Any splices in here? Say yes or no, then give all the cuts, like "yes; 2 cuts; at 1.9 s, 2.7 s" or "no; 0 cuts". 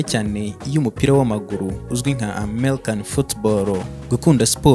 no; 0 cuts